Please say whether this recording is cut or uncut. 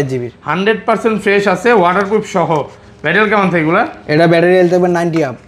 uncut